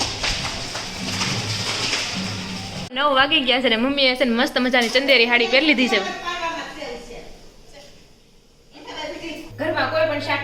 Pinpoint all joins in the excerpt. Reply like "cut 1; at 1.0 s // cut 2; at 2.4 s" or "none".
cut 1; at 3.0 s // cut 2; at 9.5 s